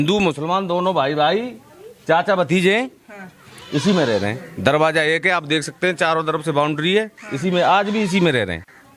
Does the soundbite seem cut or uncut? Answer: uncut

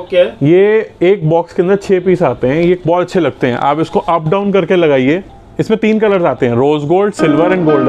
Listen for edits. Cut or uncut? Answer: uncut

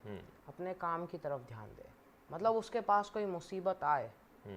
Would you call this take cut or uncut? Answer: uncut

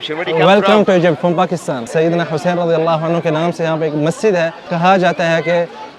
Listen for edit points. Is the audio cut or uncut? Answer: cut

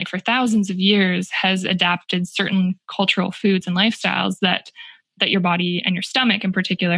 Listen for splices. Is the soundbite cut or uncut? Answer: uncut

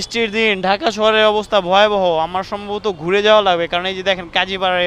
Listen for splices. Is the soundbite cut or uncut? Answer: uncut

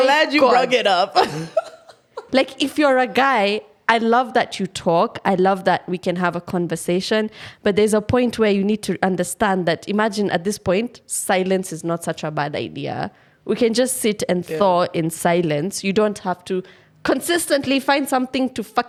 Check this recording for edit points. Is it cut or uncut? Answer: uncut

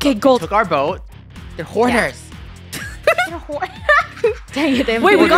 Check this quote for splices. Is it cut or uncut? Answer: uncut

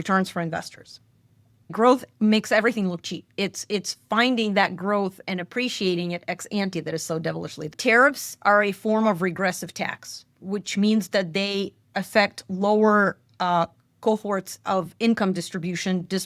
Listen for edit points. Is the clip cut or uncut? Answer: cut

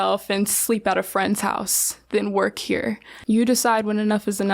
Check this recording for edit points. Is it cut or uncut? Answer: cut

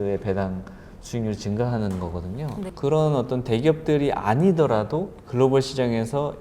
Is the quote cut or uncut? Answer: cut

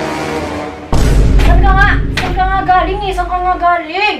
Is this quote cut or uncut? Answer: uncut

